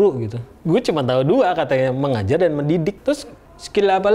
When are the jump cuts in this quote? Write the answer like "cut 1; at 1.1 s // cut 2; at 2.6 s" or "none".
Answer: none